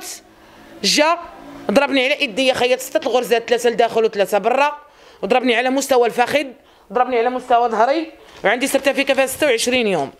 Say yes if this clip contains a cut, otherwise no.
no